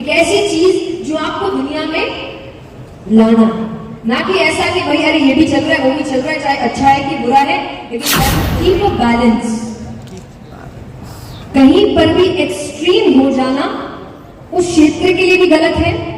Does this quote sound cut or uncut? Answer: cut